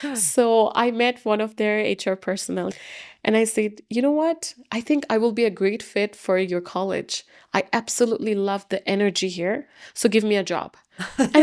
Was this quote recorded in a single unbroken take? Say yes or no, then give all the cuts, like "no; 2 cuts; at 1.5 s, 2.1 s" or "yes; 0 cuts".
no; 1 cut; at 2.7 s